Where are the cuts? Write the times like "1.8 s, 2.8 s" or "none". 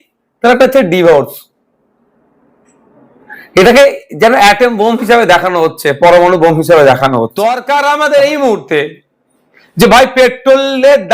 7.3 s